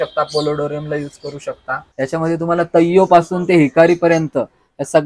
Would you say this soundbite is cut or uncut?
cut